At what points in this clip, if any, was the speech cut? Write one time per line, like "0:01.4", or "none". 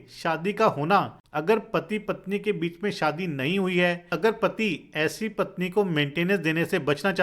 0:01.2
0:04.1